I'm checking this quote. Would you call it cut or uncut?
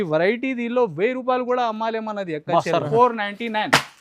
cut